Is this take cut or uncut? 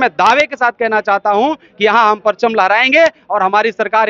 uncut